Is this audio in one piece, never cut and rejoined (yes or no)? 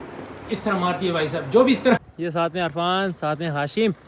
no